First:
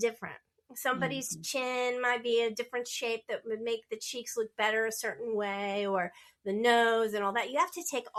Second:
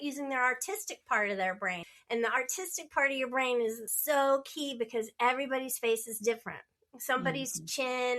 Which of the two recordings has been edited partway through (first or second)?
second